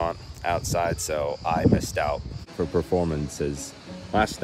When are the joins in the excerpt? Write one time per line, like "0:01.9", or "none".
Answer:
0:02.4